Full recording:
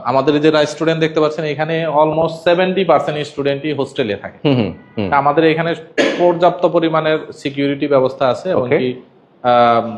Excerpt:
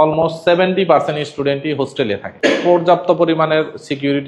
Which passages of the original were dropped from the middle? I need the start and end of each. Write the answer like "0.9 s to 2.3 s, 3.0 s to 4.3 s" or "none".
4.3 s to 5.8 s